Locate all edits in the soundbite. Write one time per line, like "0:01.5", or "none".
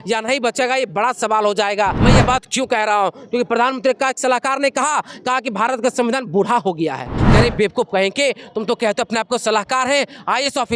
0:02.0
0:07.2